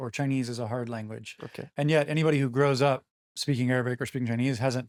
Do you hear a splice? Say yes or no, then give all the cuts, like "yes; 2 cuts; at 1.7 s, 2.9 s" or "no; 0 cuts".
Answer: no; 0 cuts